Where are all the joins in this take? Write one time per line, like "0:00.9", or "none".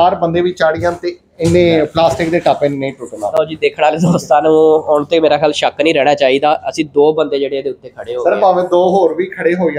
none